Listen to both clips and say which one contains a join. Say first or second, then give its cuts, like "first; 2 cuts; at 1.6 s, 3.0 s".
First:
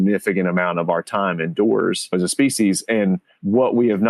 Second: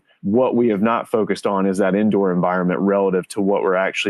first; 1 cut; at 2.1 s